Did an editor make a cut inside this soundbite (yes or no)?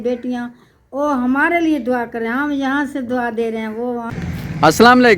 yes